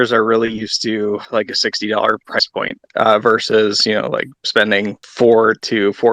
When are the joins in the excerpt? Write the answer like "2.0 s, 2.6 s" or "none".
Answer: 1.2 s, 5.0 s